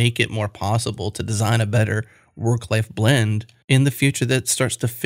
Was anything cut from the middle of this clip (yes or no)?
yes